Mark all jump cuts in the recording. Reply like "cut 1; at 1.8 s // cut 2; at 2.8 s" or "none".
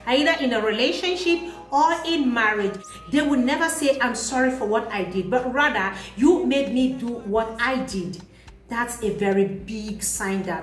cut 1; at 2.8 s